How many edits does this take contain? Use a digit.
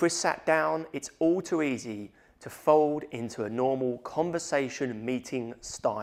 0